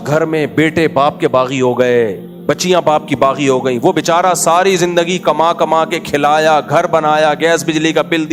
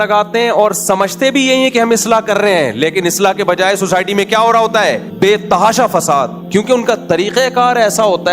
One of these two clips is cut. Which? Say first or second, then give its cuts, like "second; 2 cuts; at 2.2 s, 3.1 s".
second; 2 cuts; at 5.1 s, 6.4 s